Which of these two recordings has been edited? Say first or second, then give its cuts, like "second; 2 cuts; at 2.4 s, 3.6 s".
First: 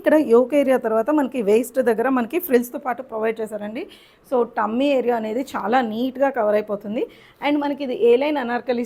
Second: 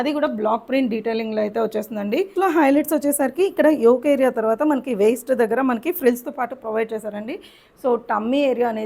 second; 1 cut; at 2.3 s